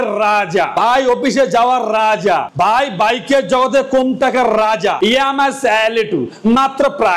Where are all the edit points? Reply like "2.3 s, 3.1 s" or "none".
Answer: 5.0 s